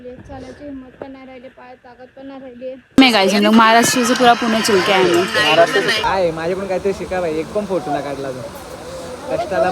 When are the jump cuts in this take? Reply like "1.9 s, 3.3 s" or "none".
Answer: 3.0 s, 6.1 s